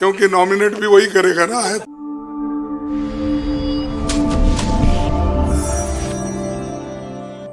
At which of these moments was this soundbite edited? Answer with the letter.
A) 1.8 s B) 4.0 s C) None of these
A